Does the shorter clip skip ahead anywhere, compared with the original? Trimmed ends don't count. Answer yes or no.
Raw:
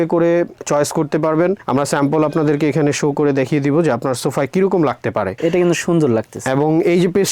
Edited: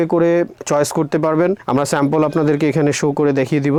no